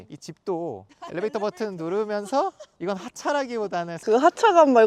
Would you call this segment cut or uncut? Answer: uncut